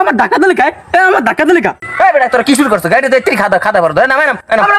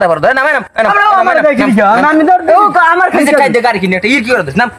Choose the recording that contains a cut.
first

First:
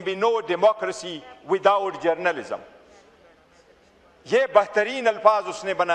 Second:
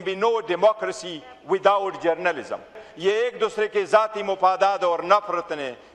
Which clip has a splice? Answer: second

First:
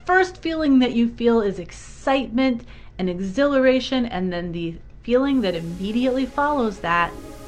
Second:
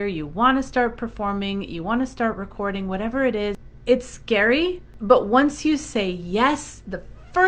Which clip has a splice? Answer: second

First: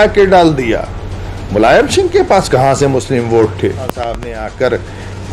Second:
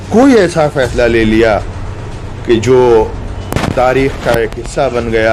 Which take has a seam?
first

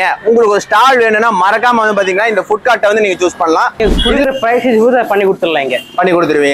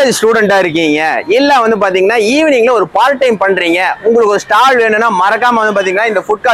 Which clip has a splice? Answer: first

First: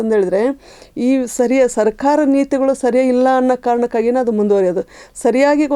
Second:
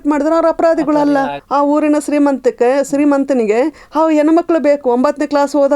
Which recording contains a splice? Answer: second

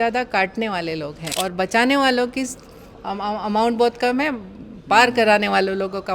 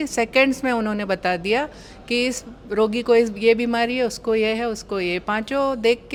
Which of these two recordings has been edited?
first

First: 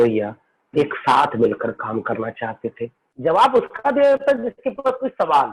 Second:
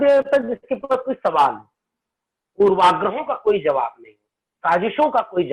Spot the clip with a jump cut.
first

